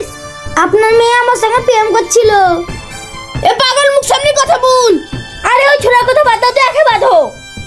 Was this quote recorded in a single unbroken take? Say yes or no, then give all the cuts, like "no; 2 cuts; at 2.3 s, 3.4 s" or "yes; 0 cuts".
yes; 0 cuts